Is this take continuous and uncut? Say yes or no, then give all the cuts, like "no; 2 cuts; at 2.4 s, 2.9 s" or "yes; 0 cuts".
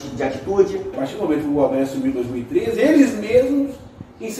no; 1 cut; at 1.0 s